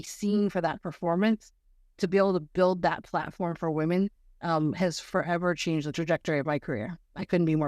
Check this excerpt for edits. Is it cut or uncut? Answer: cut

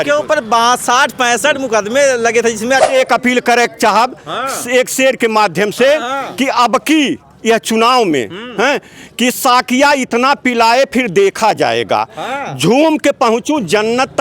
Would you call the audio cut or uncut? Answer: cut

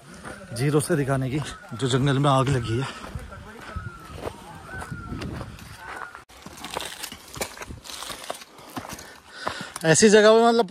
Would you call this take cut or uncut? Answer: cut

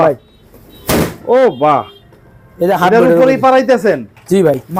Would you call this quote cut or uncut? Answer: uncut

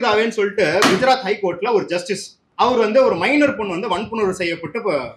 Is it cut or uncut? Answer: cut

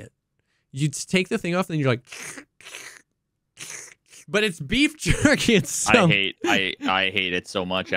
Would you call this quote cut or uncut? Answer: uncut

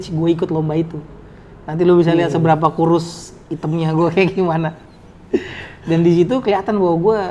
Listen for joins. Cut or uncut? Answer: uncut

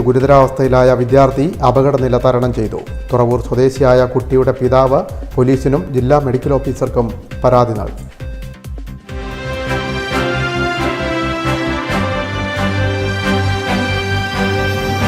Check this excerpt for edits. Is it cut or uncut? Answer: cut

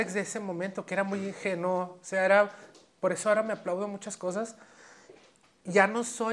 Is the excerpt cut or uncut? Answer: uncut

